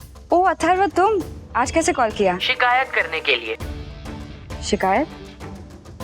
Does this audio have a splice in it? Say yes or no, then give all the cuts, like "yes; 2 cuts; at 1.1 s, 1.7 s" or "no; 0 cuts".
yes; 2 cuts; at 1.4 s, 2.5 s